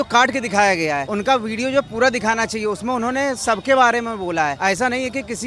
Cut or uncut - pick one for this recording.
cut